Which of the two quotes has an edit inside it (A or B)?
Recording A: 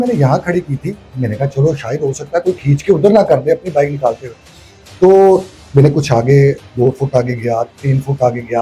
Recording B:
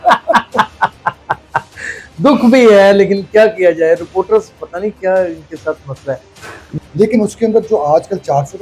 B